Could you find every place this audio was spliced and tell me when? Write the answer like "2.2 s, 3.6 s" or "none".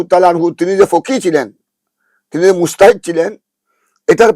none